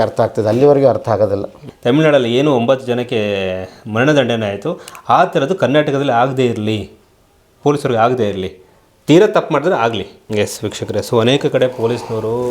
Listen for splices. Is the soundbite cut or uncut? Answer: cut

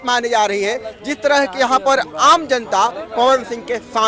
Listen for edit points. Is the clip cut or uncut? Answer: uncut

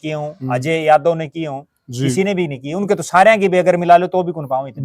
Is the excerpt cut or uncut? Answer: uncut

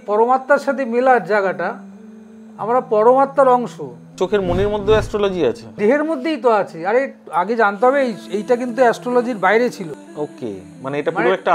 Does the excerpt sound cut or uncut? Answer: cut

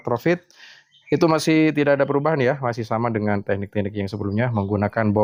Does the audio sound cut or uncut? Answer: uncut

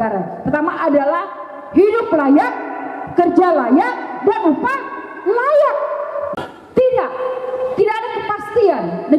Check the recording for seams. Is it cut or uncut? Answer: cut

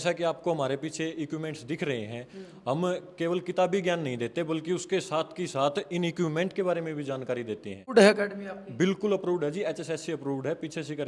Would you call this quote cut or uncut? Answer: cut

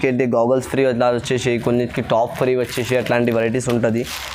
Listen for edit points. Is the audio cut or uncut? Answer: uncut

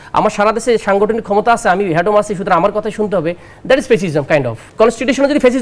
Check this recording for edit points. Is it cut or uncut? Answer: cut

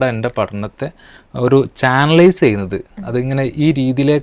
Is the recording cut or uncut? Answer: uncut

